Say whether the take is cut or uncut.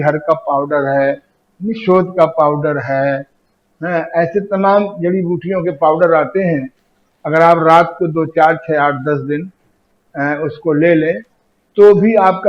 uncut